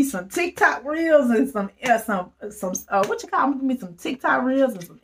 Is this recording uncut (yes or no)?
yes